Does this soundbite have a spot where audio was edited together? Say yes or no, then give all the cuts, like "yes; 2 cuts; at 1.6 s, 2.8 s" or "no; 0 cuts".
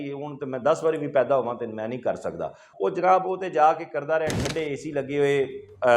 yes; 1 cut; at 2.7 s